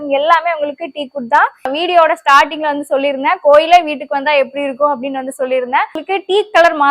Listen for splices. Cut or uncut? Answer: cut